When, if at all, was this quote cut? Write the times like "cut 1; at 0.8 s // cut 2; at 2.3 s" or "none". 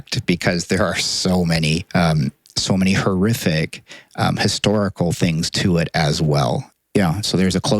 cut 1; at 1.8 s // cut 2; at 6.7 s